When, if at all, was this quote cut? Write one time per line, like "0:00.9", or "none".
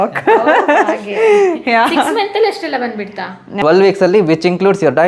0:03.5